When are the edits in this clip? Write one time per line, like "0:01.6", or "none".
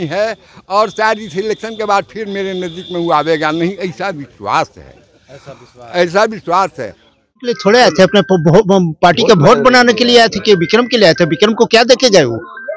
0:07.5